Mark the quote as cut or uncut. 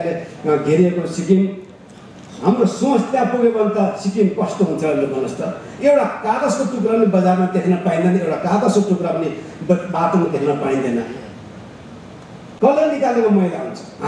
uncut